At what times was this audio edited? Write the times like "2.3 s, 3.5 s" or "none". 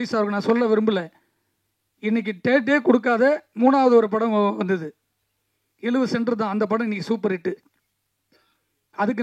none